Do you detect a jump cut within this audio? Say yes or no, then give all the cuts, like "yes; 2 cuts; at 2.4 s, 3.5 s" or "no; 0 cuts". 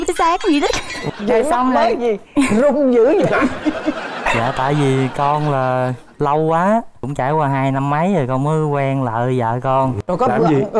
yes; 2 cuts; at 1.1 s, 10.0 s